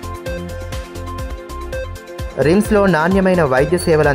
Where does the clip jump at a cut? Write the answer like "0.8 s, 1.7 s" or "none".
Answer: 1.2 s